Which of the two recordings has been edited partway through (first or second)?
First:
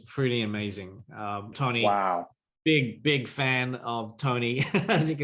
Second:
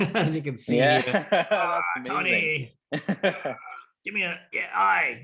first